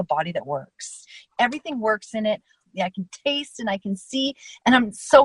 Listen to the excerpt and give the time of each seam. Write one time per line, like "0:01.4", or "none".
0:01.3
0:02.6